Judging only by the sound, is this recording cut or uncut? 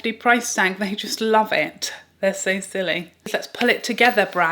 cut